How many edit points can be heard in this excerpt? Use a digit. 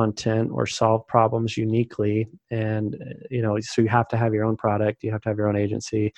0